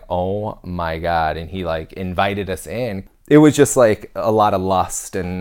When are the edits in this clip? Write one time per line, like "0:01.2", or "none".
0:03.0